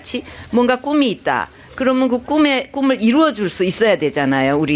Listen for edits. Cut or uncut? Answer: cut